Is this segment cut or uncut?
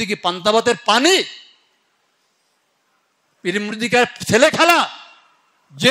uncut